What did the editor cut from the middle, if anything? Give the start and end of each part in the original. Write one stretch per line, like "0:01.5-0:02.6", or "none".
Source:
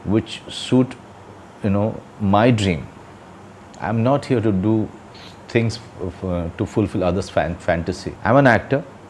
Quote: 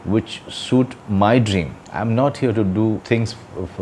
0:01.0-0:02.1
0:02.9-0:03.7
0:04.9-0:05.5